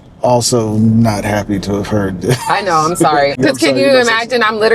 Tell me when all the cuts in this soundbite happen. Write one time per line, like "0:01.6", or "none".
0:03.4